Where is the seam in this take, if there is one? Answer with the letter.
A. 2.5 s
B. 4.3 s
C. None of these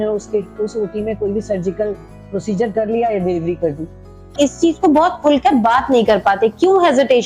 B